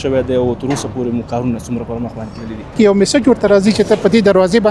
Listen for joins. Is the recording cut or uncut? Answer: cut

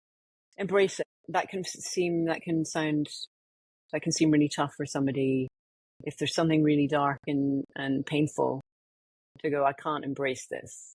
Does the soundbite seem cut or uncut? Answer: cut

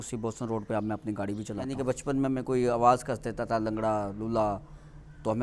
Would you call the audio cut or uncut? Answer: cut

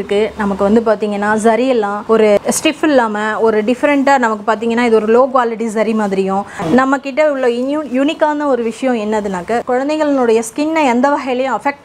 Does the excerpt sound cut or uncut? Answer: cut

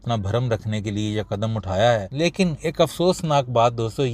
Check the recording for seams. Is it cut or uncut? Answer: cut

